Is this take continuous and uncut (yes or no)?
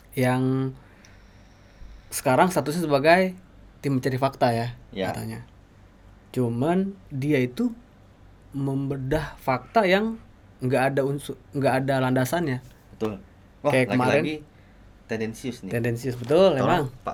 yes